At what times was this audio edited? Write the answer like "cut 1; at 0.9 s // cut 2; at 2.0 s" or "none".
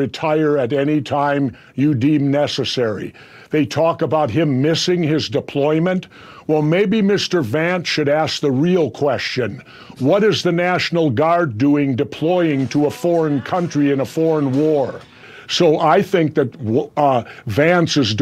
cut 1; at 15.3 s